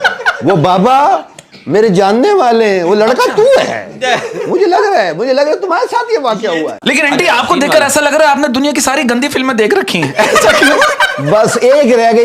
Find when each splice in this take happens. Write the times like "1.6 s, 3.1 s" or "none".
6.8 s